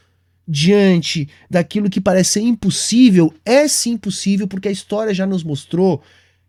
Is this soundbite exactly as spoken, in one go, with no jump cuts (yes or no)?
yes